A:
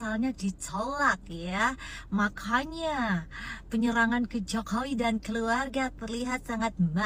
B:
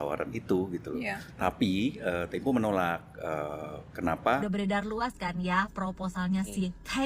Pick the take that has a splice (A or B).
B